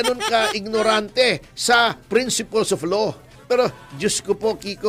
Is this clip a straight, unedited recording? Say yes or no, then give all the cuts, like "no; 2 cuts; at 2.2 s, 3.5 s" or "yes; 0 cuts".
no; 1 cut; at 3.4 s